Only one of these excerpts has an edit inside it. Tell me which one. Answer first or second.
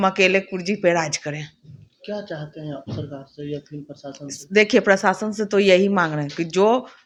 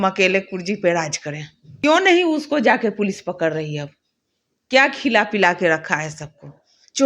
second